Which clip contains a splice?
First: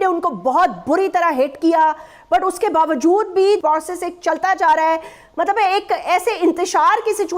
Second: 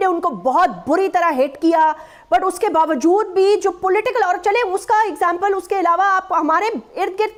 first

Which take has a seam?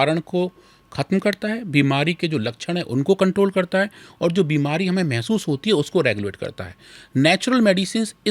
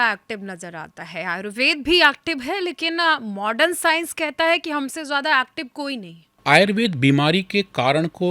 second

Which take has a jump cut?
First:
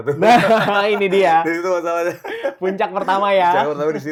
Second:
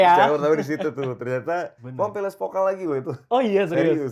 second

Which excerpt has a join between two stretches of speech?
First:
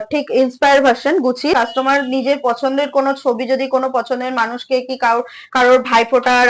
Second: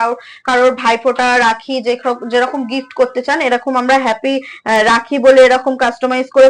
first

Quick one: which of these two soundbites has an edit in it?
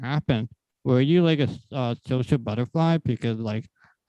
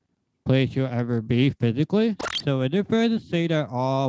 second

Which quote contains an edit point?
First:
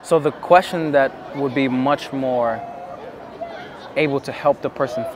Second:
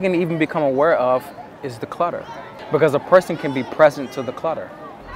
second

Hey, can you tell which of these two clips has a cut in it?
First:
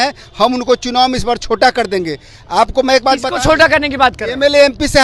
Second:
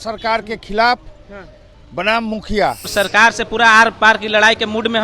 second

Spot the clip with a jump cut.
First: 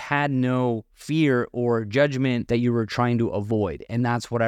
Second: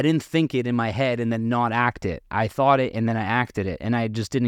first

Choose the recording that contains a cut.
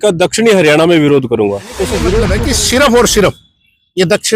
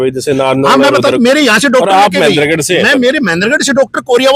first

